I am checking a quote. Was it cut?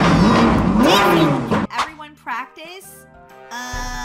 yes; 1 cut; at 1.7 s

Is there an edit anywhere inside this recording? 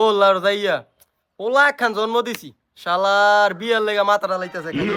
no; 0 cuts

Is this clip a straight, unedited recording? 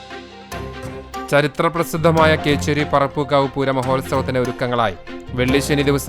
yes; 0 cuts

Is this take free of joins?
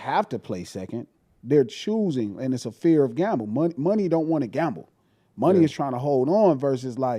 yes; 0 cuts

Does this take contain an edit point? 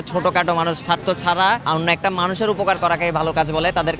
yes; 1 cut; at 1.6 s

